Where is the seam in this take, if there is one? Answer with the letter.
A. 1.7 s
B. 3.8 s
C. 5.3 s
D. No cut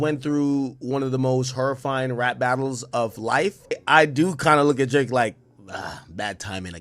B